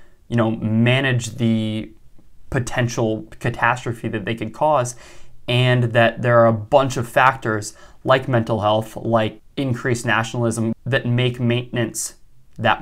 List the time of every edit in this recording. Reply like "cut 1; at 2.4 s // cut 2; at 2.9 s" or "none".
cut 1; at 9.4 s // cut 2; at 10.7 s